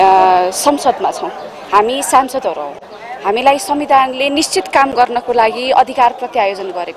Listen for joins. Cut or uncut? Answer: uncut